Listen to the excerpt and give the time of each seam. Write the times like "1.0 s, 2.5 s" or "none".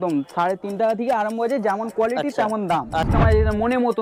3.1 s